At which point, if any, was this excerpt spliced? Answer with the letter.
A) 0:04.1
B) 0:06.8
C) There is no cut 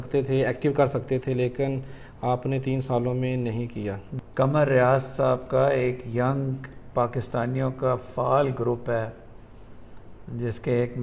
A